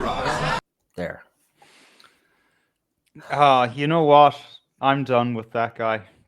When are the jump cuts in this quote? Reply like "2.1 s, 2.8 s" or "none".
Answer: 4.7 s

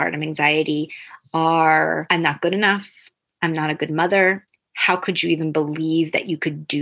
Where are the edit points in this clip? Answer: none

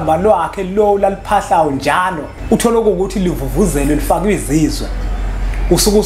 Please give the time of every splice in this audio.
2.3 s

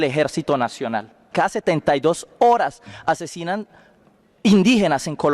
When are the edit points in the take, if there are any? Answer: 1.3 s

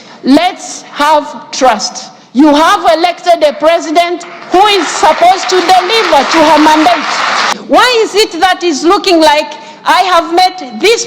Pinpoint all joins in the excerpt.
7.6 s

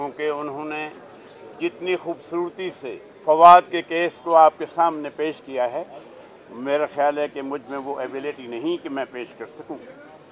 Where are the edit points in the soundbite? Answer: none

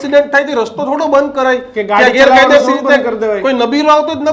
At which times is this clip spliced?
none

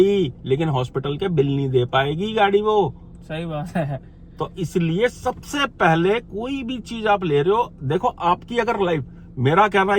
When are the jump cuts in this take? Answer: none

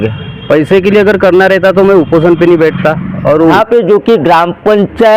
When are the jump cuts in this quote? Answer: 3.5 s

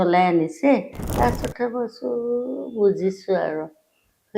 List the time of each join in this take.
1.0 s

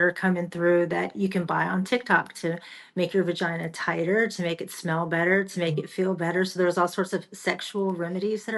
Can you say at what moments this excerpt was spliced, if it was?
none

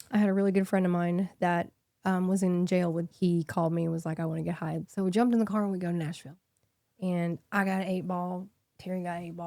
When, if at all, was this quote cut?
3.1 s, 4.8 s

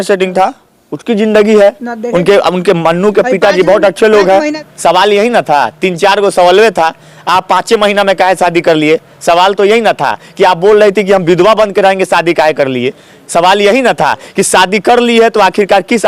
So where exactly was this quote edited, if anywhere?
4.5 s

